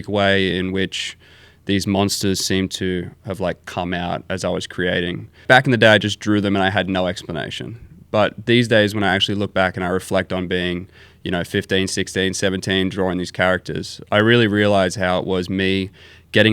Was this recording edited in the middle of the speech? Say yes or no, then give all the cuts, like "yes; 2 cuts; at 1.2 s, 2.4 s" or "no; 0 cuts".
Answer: yes; 1 cut; at 5.4 s